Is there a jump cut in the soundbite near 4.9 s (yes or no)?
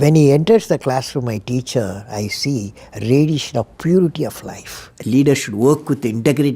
yes